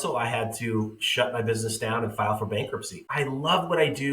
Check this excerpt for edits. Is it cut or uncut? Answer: cut